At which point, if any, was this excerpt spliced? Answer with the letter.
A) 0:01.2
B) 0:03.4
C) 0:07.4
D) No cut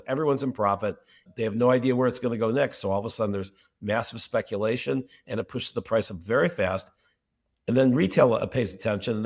A